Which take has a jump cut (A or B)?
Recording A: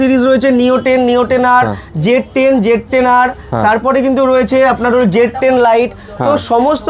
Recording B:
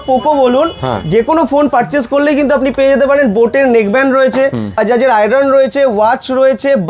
B